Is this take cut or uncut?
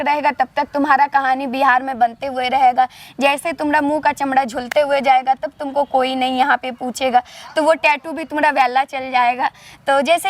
uncut